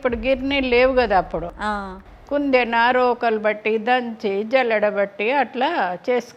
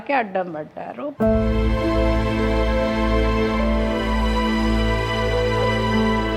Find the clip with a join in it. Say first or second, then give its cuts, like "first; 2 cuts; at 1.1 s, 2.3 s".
second; 1 cut; at 1.1 s